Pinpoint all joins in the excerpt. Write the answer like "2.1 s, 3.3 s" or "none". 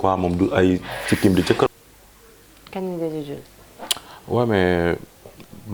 1.7 s